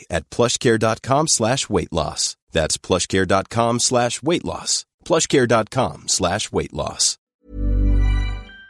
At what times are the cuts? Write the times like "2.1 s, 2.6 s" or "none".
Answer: 7.2 s